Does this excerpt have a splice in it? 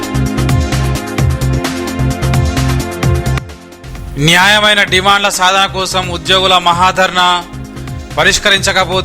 yes; 1 cut; at 1.2 s

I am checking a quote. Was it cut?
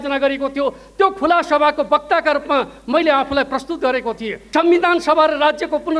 yes; 1 cut; at 4.3 s

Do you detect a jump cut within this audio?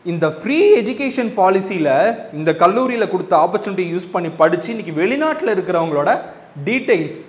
no; 0 cuts

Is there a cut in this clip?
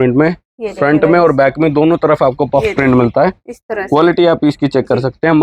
no; 0 cuts

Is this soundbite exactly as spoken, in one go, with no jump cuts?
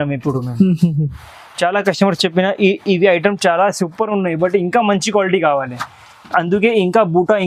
yes; 0 cuts

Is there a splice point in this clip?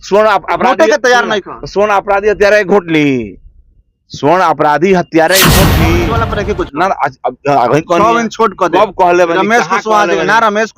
yes; 1 cut; at 5.9 s

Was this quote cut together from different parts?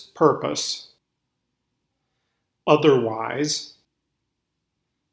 yes; 2 cuts; at 1.0 s, 3.9 s

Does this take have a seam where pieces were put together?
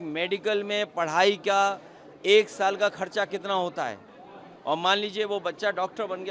no; 0 cuts

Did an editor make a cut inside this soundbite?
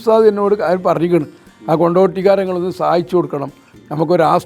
no; 0 cuts

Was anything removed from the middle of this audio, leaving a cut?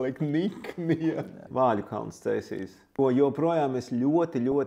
yes; 2 cuts; at 1.5 s, 2.8 s

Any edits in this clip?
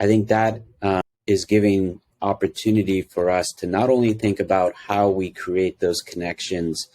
yes; 1 cut; at 1.0 s

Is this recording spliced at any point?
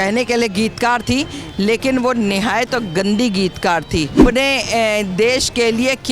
yes; 1 cut; at 4.2 s

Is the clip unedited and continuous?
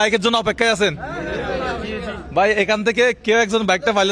yes; 0 cuts

